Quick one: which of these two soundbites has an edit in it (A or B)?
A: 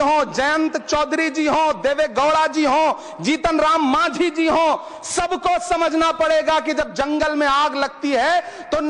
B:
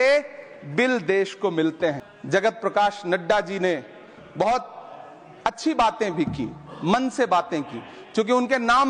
B